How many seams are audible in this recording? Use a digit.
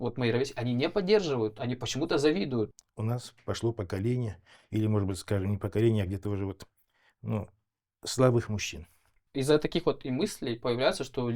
2